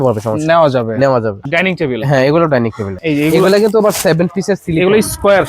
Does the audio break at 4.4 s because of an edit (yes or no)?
no